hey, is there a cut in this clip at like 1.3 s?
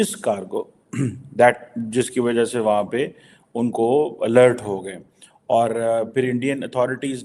no; 0 cuts

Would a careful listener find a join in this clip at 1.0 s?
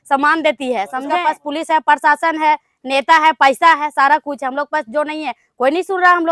yes; 1 cut; at 1.0 s

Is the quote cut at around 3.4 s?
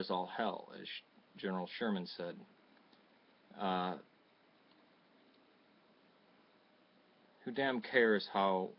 no; 1 cut; at 4.7 s

